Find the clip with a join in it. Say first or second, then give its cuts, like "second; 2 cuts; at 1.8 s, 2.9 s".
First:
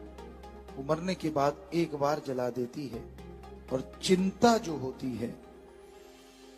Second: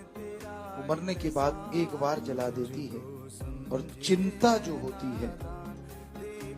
second; 1 cut; at 5.4 s